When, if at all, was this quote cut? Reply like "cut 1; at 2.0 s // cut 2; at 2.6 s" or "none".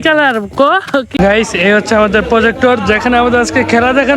cut 1; at 1.1 s